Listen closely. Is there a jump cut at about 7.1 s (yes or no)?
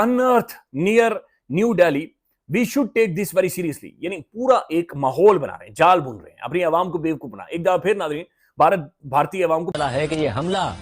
no